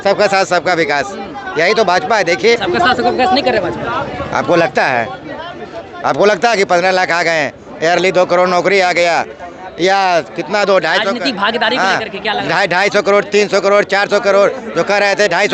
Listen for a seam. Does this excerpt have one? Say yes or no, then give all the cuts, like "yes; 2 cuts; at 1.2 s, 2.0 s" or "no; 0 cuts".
yes; 1 cut; at 2.6 s